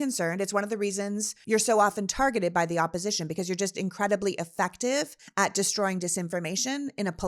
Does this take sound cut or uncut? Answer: cut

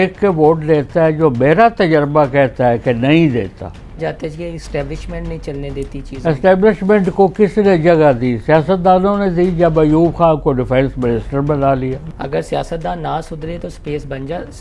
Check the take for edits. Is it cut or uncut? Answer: cut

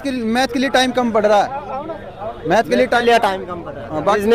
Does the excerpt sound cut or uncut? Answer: uncut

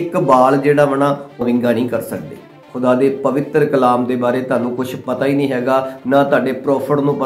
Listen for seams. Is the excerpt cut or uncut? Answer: cut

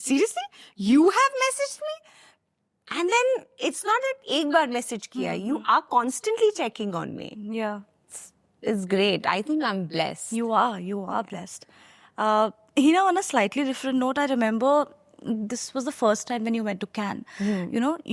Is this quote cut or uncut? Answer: uncut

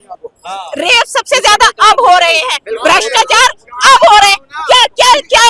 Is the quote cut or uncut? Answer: uncut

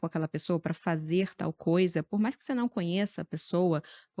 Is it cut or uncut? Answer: uncut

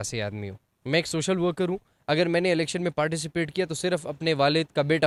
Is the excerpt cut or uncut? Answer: uncut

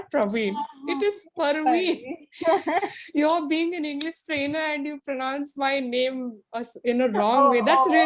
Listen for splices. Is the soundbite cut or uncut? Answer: uncut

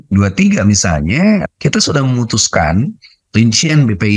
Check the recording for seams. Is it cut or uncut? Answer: cut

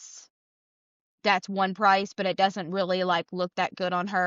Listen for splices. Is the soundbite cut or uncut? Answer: uncut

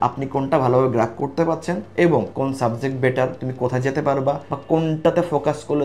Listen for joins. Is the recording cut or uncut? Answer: cut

